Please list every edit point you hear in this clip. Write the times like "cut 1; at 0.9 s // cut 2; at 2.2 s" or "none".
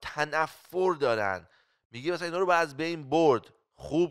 none